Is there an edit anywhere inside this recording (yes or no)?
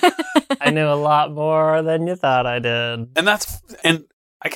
no